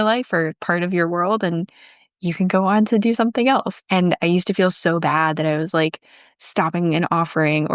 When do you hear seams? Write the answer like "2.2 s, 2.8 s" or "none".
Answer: 3.8 s